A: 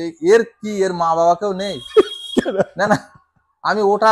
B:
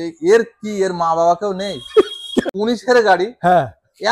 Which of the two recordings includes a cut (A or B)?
B